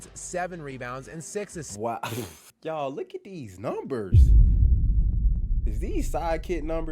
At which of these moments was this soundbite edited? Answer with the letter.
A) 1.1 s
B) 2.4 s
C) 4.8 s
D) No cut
B